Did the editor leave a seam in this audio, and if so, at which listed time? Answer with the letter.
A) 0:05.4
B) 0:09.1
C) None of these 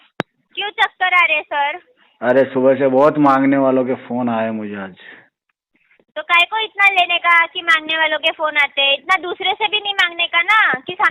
C